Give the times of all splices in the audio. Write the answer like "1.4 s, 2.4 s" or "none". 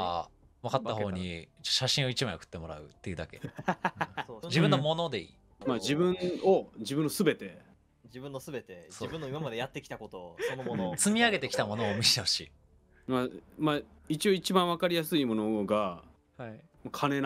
none